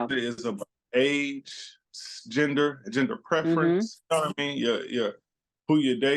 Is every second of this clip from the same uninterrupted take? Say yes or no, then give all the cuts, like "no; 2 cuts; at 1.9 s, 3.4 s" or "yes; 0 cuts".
no; 1 cut; at 1.8 s